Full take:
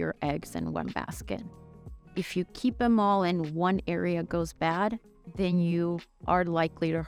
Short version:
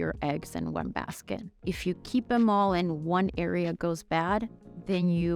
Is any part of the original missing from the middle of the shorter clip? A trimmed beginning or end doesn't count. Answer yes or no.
yes